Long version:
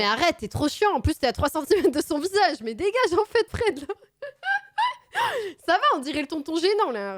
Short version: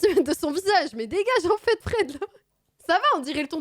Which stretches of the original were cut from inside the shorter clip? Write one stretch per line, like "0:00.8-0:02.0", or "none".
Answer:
0:04.4-0:05.5